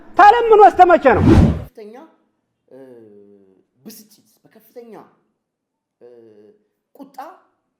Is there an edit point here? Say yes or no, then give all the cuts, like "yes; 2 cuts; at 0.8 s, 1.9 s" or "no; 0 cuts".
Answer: yes; 1 cut; at 1.4 s